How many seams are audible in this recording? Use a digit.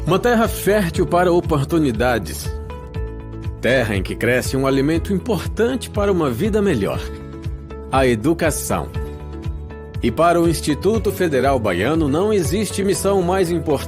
1